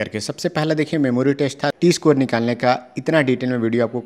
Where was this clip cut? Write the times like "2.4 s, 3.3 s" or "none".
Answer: 1.8 s

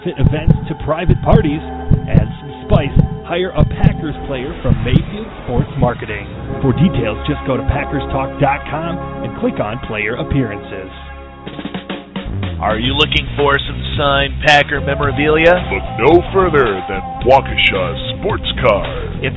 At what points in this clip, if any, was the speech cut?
11.4 s

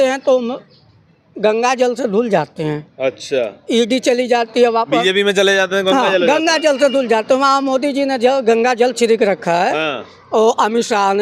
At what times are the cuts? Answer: none

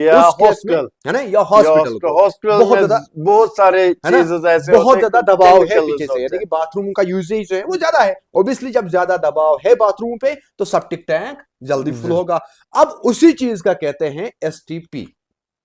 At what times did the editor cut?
none

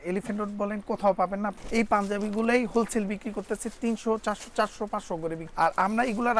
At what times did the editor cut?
1.6 s, 5.4 s

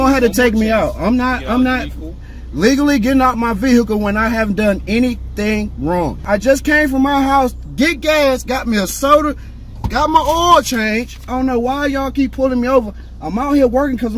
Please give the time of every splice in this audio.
6.2 s, 11.3 s

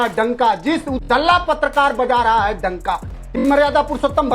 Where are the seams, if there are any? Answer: 1.0 s, 3.1 s

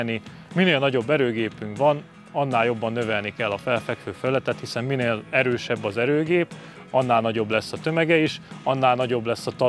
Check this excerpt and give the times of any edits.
none

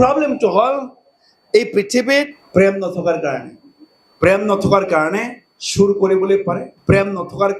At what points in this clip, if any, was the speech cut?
2.4 s, 6.7 s

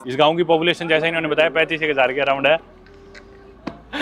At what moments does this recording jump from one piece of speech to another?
none

